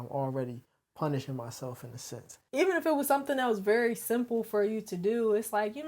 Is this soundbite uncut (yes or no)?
no